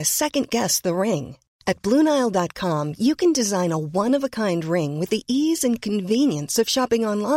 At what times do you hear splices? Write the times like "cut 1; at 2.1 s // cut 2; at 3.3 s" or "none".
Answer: none

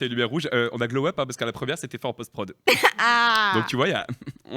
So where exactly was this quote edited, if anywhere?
none

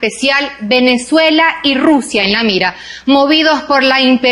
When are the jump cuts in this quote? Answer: cut 1; at 1.4 s

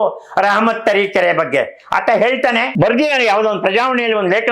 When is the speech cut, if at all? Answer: cut 1; at 2.7 s

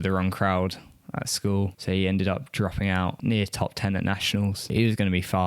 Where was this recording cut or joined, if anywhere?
cut 1; at 3.2 s // cut 2; at 4.7 s

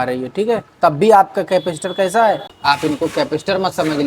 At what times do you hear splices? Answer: cut 1; at 2.5 s

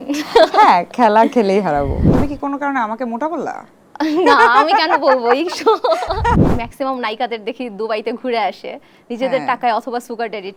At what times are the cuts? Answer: cut 1; at 2.1 s // cut 2; at 6.4 s

